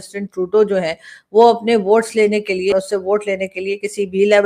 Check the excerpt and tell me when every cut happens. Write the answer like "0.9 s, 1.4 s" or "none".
2.7 s